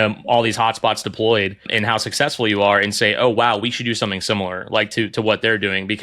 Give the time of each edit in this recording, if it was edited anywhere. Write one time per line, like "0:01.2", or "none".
0:01.7

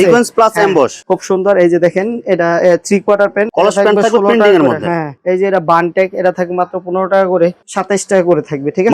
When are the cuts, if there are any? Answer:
0:01.0
0:03.5
0:07.6

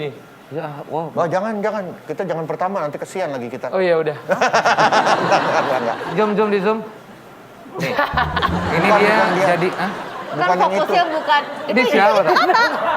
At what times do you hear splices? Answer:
0:06.1

